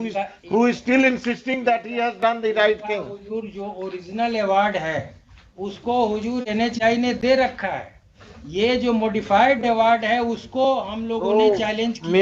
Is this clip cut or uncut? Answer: uncut